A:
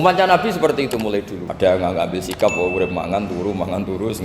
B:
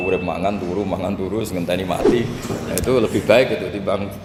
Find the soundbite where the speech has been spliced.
A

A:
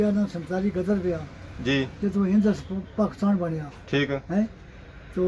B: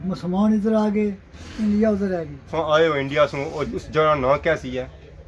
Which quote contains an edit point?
B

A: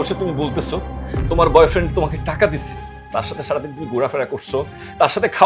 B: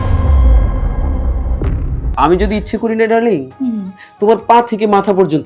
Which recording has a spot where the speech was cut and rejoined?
B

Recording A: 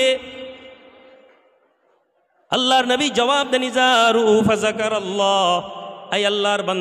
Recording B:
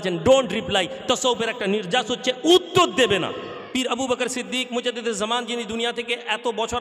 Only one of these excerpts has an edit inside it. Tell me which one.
B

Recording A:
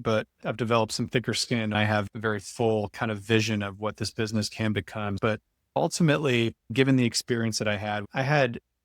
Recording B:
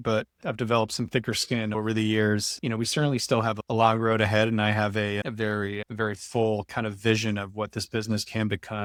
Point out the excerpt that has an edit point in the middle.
A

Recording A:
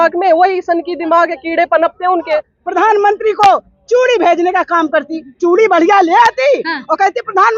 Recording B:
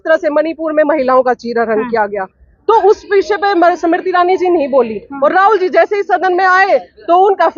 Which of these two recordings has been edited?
A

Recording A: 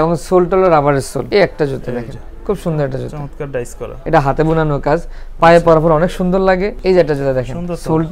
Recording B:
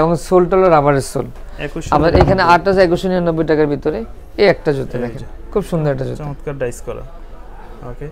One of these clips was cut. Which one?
A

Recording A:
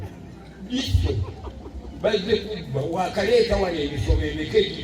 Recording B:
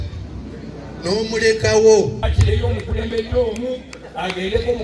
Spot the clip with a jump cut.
B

